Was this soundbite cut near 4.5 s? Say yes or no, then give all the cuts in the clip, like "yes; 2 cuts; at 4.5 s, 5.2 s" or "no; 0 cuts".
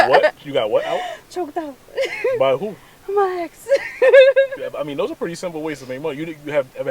yes; 1 cut; at 4.5 s